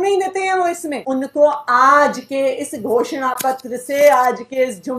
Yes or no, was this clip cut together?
yes